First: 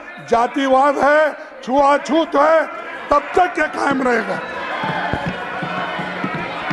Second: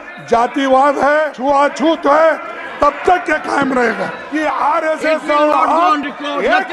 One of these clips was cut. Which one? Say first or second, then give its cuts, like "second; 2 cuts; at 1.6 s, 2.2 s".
second; 2 cuts; at 1.3 s, 4.2 s